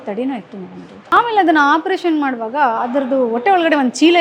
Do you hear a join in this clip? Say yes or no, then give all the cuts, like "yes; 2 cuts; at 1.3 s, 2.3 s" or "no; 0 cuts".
yes; 1 cut; at 1.0 s